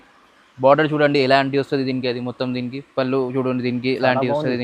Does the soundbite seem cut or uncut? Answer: uncut